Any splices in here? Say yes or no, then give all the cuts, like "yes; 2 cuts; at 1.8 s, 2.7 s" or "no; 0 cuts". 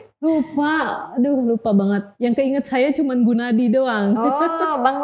no; 0 cuts